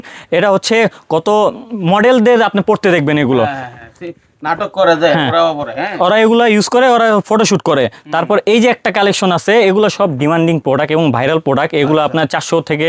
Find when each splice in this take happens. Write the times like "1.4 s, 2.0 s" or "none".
none